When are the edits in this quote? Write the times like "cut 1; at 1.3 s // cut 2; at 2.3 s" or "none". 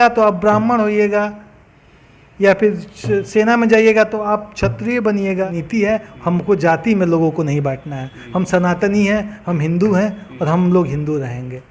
cut 1; at 5.6 s